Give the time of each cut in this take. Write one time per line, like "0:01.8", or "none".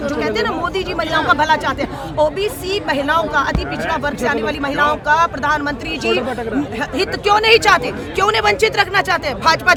none